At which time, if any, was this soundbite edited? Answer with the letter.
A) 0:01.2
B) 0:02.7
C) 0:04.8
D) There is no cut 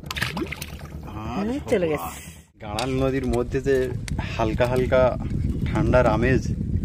B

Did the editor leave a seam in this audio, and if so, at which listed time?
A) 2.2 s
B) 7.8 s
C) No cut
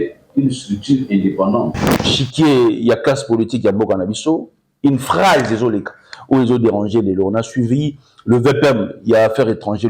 A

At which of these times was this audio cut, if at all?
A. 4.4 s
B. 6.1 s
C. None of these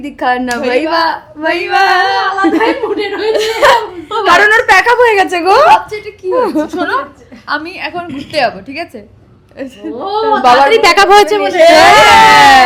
C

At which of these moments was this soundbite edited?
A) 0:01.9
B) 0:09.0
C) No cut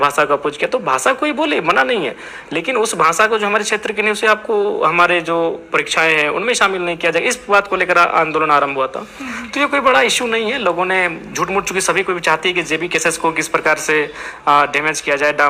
C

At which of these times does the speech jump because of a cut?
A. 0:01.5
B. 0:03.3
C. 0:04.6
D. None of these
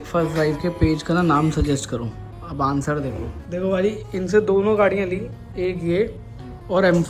B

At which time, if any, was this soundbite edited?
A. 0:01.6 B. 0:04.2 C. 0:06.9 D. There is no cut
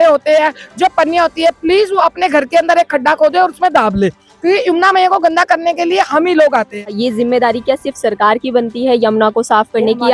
C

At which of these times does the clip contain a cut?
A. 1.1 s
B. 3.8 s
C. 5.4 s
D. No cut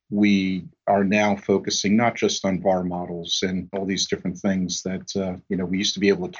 B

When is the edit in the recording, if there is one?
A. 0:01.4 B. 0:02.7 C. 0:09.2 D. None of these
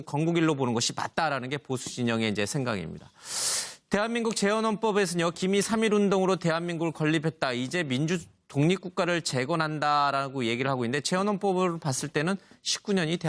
C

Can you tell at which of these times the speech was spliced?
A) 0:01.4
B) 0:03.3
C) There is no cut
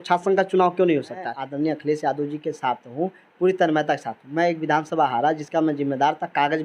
A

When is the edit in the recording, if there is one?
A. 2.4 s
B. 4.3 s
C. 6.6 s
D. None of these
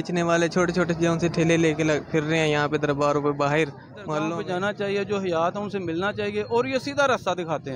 B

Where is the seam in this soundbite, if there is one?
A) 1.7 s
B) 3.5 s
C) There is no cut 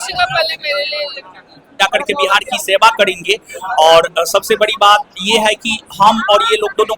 A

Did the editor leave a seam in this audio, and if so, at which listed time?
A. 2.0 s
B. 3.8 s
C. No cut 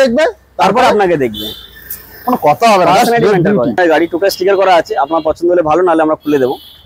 B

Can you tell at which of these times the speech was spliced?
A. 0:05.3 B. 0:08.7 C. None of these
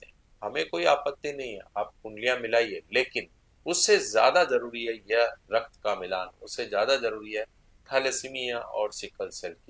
C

